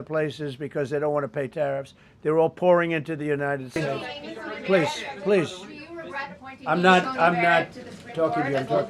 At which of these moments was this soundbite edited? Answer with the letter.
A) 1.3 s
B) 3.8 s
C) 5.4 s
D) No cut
B